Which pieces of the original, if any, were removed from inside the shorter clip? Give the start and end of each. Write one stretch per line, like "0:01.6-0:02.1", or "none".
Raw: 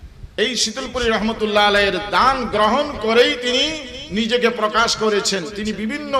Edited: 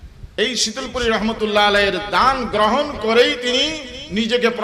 none